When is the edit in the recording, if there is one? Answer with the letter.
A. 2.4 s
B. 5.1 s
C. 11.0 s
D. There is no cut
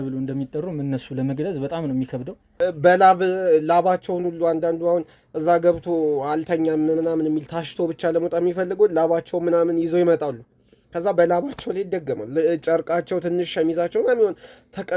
A